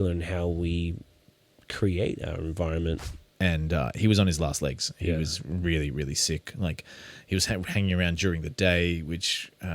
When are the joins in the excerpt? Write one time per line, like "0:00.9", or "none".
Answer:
0:03.2